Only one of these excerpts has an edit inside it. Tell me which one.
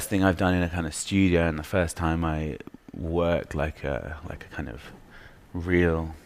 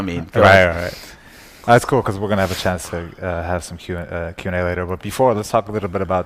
second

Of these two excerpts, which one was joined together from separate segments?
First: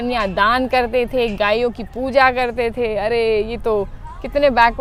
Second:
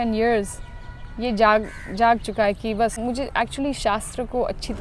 second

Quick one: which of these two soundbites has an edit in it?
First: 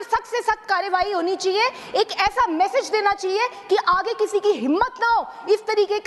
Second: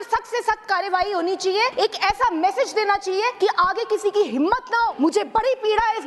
second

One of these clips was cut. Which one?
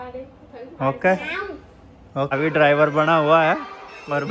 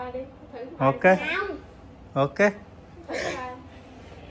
first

